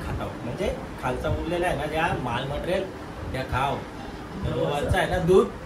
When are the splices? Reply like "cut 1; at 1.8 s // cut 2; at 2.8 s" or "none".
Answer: none

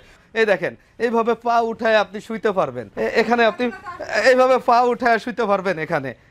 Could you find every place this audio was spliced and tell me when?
cut 1; at 2.8 s

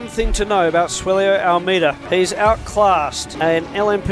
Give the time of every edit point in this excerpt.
cut 1; at 2.0 s // cut 2; at 3.2 s

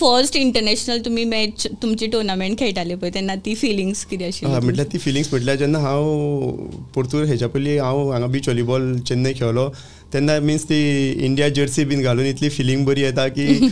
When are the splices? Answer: none

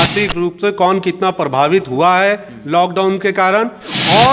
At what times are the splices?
none

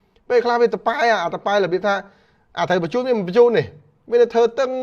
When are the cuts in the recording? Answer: none

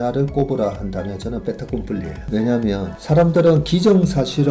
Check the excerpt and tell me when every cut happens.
cut 1; at 2.2 s // cut 2; at 2.9 s

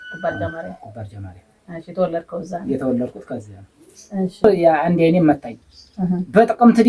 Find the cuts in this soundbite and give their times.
cut 1; at 4.4 s

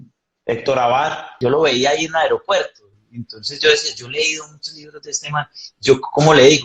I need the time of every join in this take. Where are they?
cut 1; at 1.3 s

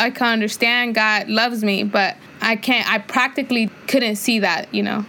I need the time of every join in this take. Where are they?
cut 1; at 2.3 s // cut 2; at 3.7 s

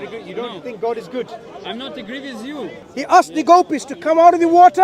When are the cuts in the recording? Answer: cut 1; at 2.8 s

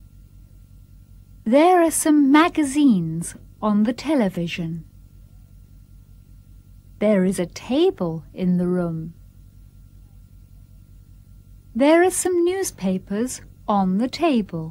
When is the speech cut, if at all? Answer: cut 1; at 5.0 s // cut 2; at 7.0 s

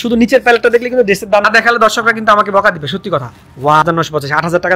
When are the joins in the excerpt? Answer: cut 1; at 1.4 s // cut 2; at 3.8 s

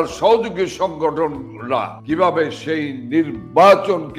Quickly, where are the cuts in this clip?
none

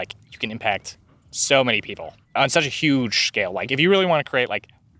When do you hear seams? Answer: cut 1; at 2.2 s

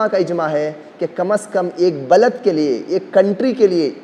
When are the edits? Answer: none

